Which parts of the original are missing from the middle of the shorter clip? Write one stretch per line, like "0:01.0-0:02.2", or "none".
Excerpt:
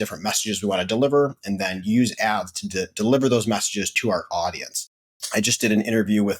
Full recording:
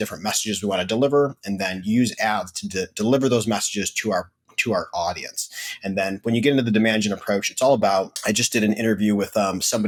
0:03.9-0:04.5
0:05.8-0:08.1